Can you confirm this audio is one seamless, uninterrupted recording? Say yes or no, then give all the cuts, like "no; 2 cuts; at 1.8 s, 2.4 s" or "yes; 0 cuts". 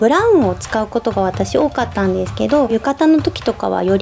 no; 1 cut; at 2.7 s